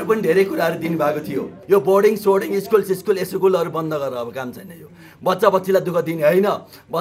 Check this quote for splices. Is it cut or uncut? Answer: cut